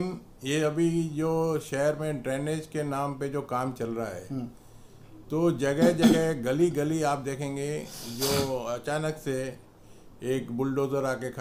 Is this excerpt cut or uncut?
uncut